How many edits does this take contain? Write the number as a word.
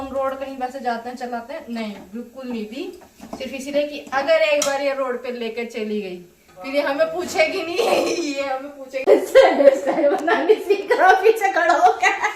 one